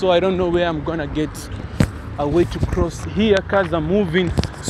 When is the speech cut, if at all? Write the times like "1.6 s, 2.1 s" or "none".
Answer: 2.5 s